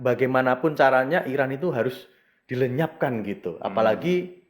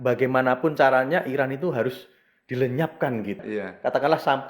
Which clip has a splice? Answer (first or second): second